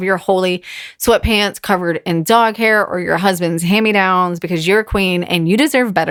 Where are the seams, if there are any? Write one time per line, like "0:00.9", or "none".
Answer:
none